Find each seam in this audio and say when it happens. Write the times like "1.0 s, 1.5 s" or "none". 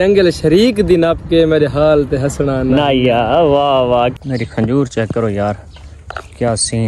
4.1 s